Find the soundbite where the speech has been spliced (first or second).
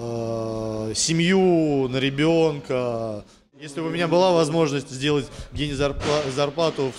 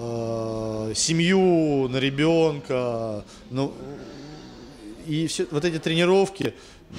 first